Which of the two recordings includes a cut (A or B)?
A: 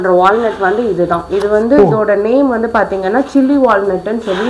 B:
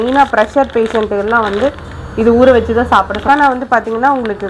B